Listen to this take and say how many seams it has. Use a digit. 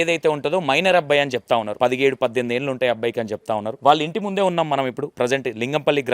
3